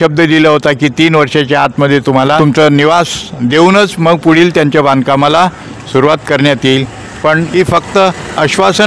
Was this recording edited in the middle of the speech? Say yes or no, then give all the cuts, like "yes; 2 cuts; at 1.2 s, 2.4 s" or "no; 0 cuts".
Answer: yes; 2 cuts; at 2.4 s, 7.1 s